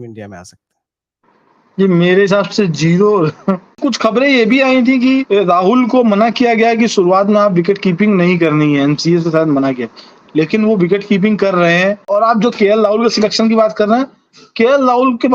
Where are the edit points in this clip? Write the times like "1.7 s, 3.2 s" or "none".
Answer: 3.8 s, 5.2 s, 12.1 s